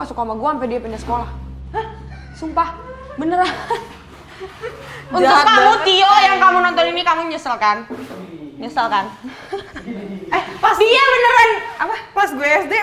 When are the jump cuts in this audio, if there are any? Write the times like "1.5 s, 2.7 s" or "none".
none